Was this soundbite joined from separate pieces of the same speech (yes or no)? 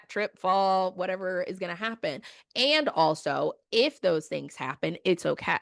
no